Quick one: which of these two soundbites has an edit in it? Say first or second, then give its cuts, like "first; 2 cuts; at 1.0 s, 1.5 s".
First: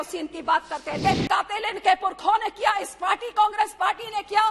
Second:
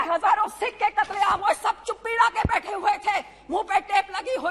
first; 1 cut; at 1.0 s